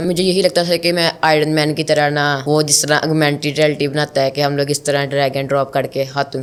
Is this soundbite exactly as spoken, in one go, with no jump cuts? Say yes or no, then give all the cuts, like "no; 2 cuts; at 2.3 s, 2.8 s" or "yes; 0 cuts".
yes; 0 cuts